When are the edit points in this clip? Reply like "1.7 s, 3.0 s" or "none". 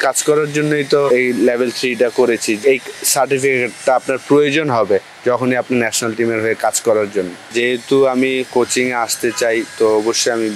1.1 s, 2.6 s, 7.4 s